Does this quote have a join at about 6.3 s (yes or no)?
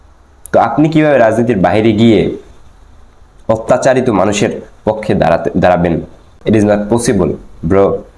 yes